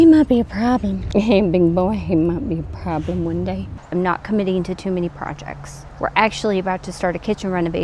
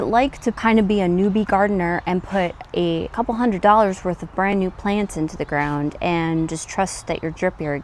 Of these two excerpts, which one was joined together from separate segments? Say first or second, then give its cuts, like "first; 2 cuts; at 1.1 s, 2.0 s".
first; 2 cuts; at 1.0 s, 3.8 s